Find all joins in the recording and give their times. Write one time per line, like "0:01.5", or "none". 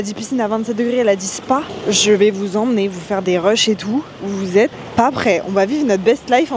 0:01.6
0:04.8